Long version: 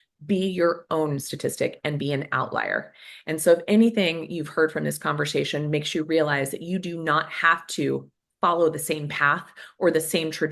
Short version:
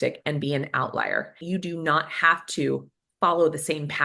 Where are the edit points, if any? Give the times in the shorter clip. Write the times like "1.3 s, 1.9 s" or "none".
1.4 s